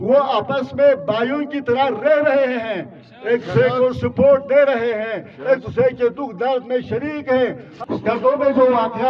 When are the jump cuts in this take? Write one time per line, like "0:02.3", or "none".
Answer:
0:07.7